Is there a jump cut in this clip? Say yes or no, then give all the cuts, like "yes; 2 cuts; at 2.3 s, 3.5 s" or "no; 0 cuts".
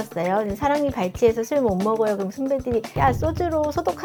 no; 0 cuts